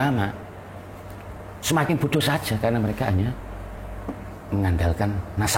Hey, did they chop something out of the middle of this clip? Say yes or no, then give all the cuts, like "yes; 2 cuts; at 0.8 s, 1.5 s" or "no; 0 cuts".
no; 0 cuts